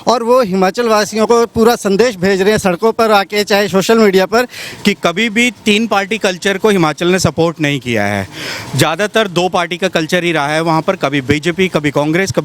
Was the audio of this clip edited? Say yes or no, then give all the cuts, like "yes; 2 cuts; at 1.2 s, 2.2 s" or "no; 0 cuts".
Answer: yes; 1 cut; at 4.6 s